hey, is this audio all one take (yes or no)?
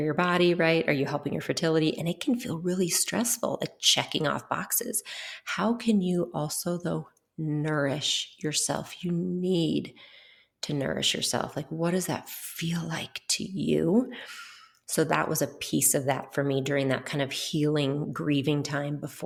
yes